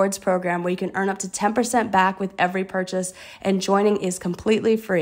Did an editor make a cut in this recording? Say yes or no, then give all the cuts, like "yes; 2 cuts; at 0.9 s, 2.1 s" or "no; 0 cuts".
no; 0 cuts